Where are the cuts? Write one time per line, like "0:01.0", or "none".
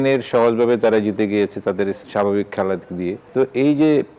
0:02.0
0:03.2

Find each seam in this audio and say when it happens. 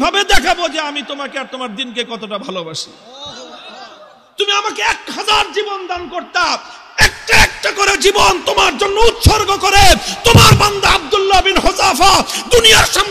none

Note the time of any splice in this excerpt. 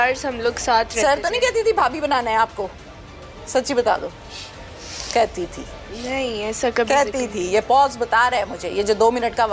none

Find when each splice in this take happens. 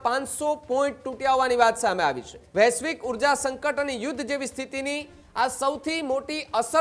0:02.4

